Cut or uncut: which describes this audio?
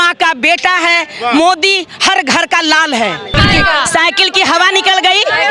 cut